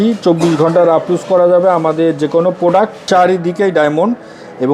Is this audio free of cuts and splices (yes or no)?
no